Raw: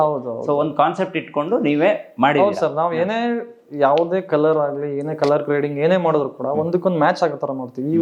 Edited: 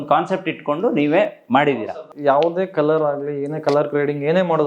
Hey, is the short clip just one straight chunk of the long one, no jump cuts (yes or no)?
no